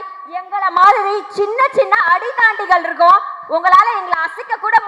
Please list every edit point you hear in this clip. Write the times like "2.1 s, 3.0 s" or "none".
none